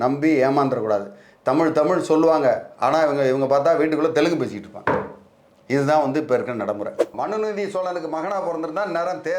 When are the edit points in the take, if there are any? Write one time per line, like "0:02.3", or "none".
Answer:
0:07.1